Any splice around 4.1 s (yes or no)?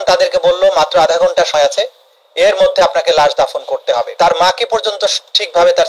yes